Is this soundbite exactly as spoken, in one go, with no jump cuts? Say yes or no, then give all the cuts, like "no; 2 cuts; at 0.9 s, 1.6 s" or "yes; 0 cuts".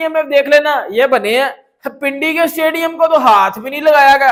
yes; 0 cuts